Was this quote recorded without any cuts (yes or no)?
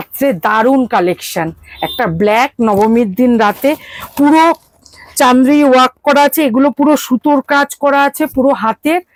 yes